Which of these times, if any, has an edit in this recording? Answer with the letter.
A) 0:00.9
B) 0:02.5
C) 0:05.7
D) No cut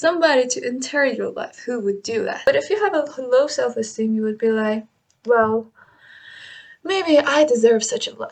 B